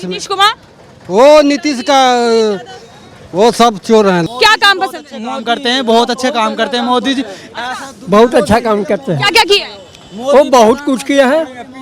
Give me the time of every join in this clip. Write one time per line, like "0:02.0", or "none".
0:04.3